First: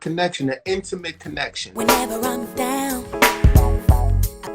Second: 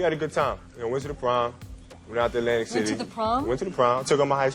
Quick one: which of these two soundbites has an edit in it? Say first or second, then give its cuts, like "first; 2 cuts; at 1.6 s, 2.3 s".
first; 1 cut; at 1.6 s